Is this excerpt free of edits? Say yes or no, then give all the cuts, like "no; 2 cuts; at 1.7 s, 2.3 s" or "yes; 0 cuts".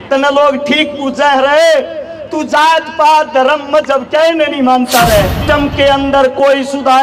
no; 1 cut; at 5.4 s